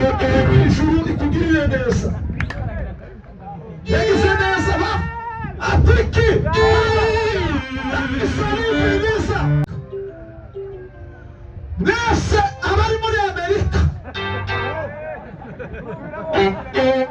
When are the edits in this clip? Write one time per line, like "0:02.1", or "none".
0:09.7